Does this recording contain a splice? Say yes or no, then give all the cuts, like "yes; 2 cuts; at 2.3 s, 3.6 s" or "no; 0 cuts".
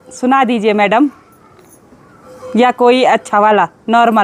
no; 0 cuts